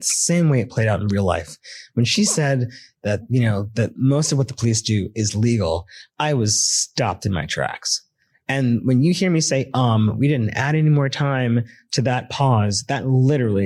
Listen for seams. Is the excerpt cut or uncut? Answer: uncut